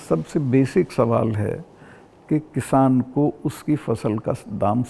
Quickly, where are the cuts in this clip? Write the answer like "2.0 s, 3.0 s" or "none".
none